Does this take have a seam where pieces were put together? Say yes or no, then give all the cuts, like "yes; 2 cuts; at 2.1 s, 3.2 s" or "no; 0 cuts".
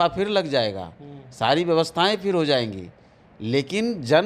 no; 0 cuts